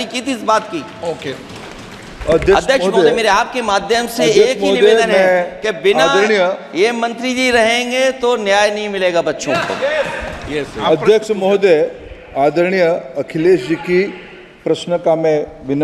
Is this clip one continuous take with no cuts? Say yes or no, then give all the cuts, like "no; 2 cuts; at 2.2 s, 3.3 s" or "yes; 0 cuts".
yes; 0 cuts